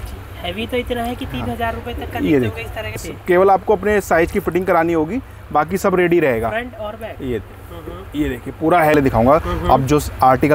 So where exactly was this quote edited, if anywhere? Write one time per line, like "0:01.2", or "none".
0:03.0
0:08.9